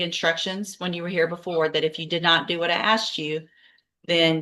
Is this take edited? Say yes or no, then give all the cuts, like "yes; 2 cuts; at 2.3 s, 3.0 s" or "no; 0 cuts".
no; 0 cuts